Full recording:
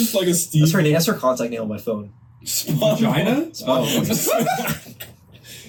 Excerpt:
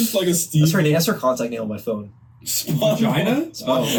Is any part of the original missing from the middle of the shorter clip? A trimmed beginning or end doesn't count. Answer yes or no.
no